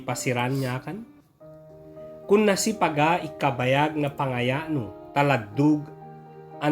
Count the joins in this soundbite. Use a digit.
0